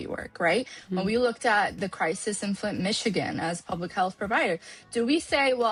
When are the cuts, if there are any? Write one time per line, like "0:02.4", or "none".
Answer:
none

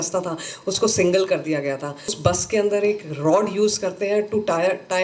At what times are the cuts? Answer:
0:02.2

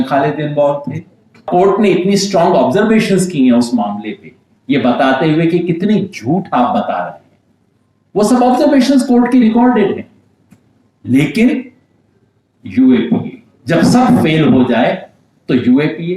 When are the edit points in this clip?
0:01.5

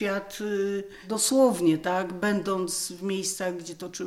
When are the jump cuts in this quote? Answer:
0:01.0

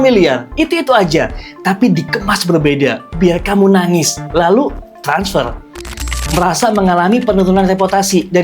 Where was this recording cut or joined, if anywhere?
0:06.0

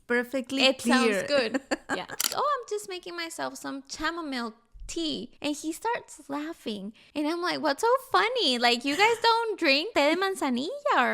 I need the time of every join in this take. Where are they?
0:02.3
0:05.3
0:07.0
0:09.9

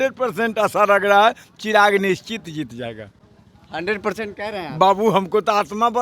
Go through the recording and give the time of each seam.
none

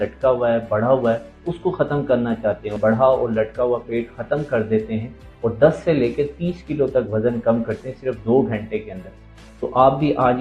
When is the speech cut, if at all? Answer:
0:02.8

